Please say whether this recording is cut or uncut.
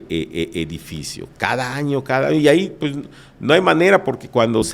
uncut